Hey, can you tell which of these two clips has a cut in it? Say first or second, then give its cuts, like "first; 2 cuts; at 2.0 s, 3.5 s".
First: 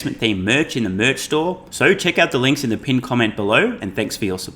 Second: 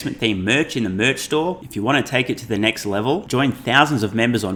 first; 1 cut; at 1.7 s